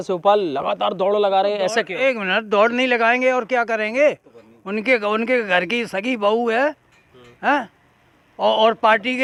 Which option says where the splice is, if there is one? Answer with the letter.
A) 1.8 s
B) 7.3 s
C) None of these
C